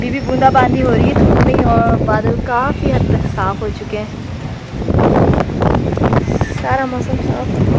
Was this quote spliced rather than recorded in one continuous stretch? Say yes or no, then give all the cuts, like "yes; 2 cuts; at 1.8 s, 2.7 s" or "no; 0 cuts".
no; 0 cuts